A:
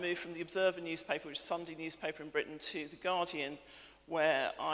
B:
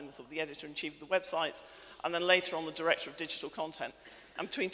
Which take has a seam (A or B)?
A